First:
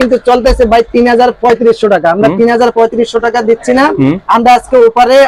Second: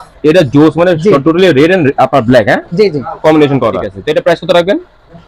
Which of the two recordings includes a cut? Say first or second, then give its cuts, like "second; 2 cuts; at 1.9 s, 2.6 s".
second; 1 cut; at 3.9 s